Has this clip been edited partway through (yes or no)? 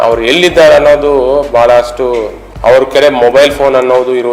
yes